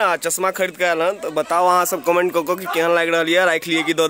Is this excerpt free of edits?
yes; 0 cuts

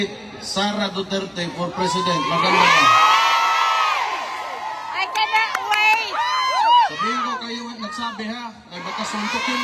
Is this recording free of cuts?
yes; 0 cuts

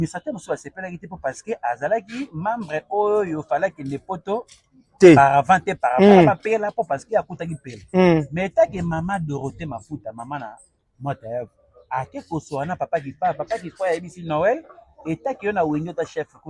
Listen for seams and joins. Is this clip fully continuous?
yes; 0 cuts

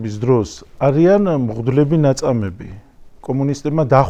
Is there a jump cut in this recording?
no; 0 cuts

